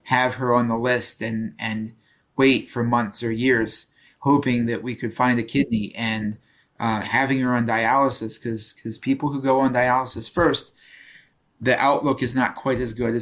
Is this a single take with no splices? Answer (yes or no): yes